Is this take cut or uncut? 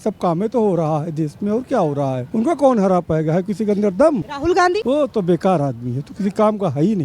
cut